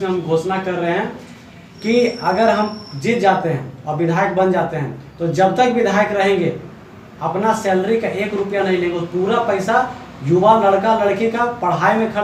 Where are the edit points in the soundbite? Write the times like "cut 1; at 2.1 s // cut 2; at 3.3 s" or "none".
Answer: none

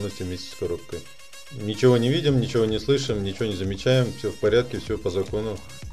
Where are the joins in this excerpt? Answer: cut 1; at 1.5 s

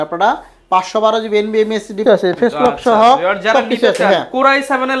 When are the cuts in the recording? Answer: cut 1; at 2.0 s

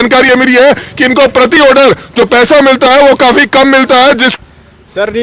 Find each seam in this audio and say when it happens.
cut 1; at 4.3 s

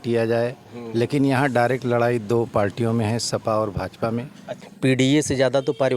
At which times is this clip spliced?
cut 1; at 4.6 s

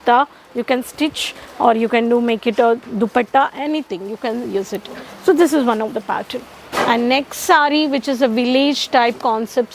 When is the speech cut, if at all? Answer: none

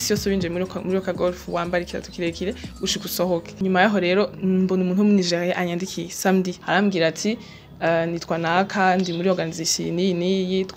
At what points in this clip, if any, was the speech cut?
cut 1; at 3.5 s

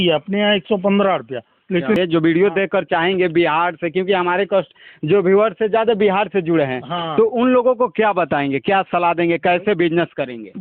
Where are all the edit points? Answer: cut 1; at 2.0 s

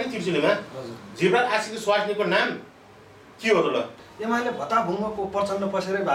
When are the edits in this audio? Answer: cut 1; at 4.1 s

